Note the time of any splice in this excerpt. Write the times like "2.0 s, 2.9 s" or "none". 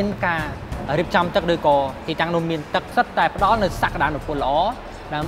2.9 s